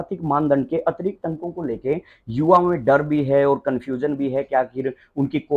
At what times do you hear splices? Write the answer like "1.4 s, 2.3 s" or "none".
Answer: none